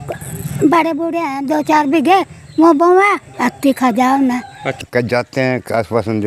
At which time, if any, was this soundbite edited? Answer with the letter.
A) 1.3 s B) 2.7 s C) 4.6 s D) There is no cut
C